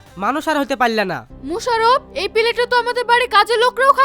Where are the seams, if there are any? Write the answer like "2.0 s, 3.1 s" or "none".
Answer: 1.1 s